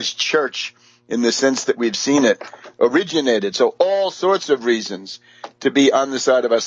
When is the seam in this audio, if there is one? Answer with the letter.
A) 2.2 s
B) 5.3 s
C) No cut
A